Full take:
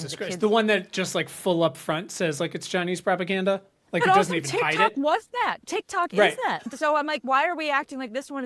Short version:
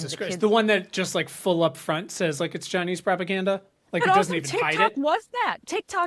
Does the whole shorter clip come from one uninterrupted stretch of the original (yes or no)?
yes